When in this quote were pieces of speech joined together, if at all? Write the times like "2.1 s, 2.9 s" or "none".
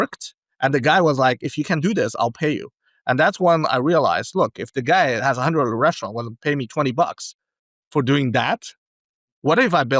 none

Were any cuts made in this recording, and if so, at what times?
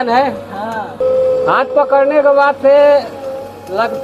1.0 s

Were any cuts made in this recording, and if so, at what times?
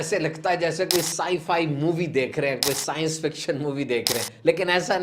none

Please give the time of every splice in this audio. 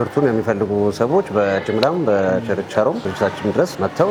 none

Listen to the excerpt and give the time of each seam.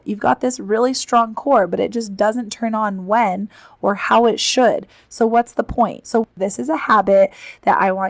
6.1 s

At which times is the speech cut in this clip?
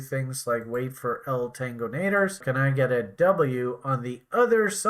2.4 s

